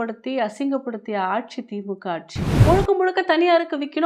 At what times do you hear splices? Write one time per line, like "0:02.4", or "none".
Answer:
0:02.5